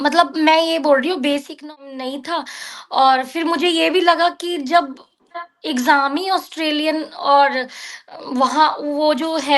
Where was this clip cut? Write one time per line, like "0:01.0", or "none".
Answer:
0:01.6